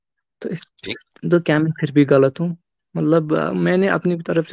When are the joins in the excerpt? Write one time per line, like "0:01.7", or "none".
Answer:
none